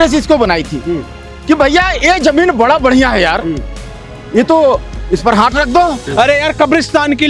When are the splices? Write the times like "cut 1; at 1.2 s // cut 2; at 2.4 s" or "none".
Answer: cut 1; at 6.0 s